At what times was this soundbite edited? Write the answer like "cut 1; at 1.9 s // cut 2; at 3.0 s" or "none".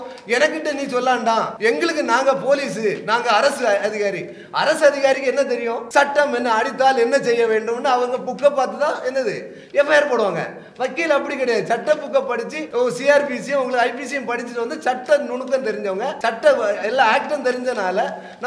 cut 1; at 1.5 s // cut 2; at 5.8 s // cut 3; at 12.6 s // cut 4; at 16.1 s